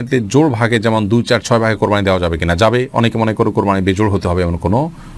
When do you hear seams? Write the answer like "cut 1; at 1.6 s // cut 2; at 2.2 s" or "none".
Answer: none